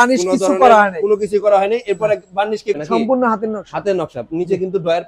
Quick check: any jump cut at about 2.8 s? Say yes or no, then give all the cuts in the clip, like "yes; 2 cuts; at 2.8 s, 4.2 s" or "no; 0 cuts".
yes; 1 cut; at 2.8 s